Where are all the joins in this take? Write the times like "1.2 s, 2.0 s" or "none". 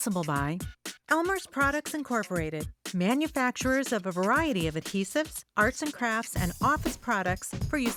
none

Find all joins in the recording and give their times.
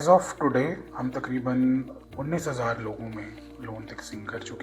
0.9 s, 2.0 s

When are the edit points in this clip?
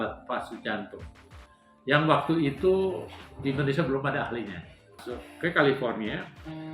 5.0 s

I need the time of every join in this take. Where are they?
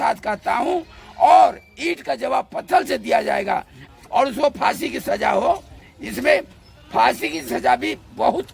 3.9 s

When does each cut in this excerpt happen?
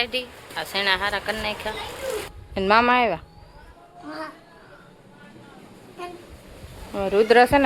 2.4 s

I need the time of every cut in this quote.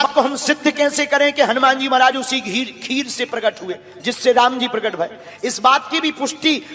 none

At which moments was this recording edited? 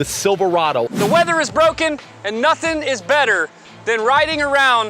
0.9 s

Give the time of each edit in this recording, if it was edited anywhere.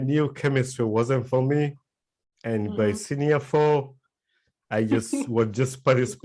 none

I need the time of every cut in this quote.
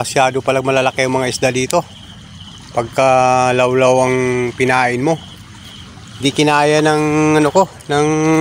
none

